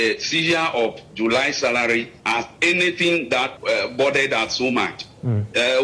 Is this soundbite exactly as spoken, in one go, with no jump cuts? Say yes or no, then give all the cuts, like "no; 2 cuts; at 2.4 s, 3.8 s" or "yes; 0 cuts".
no; 1 cut; at 3.5 s